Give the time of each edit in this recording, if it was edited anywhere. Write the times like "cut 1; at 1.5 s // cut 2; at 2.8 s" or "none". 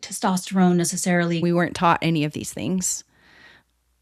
cut 1; at 1.4 s